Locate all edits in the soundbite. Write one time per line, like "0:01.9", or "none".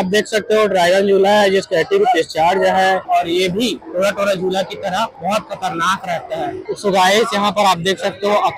0:03.0
0:06.6